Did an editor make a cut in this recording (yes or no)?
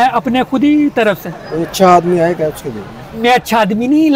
yes